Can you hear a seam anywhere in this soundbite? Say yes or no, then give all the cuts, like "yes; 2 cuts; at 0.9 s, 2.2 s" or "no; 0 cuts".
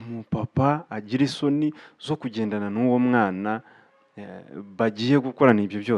no; 0 cuts